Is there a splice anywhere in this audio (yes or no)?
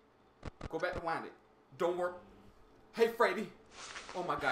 no